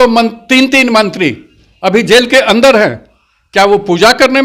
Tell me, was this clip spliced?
no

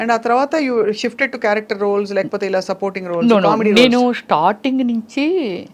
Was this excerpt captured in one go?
yes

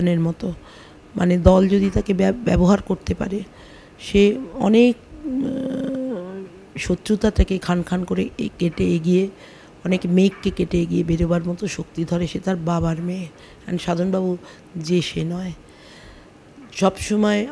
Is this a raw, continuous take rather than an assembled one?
no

